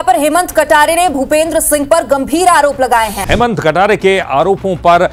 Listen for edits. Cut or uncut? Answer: uncut